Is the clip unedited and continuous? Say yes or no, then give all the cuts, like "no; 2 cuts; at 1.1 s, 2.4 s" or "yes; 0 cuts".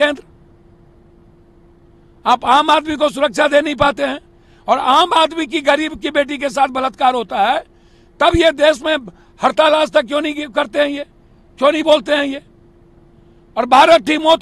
yes; 0 cuts